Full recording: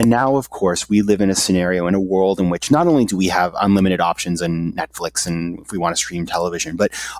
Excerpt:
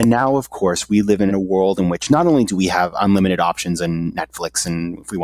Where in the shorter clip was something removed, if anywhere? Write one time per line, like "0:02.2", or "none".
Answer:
0:01.3